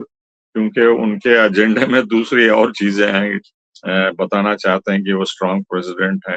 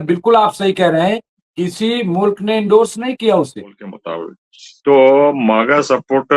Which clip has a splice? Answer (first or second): second